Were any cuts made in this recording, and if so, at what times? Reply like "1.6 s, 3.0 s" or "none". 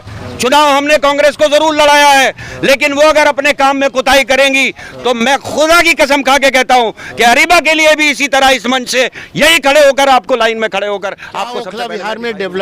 11.7 s